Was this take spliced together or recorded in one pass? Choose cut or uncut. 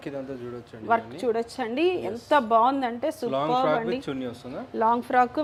uncut